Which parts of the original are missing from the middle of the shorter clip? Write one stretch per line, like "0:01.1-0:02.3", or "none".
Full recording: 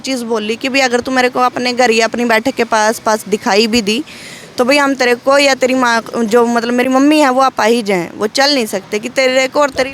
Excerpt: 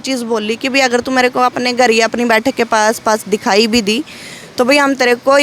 none